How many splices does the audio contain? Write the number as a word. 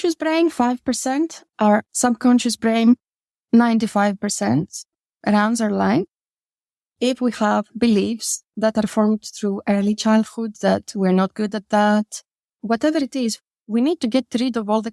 two